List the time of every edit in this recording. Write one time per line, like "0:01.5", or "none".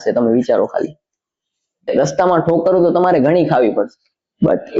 0:01.9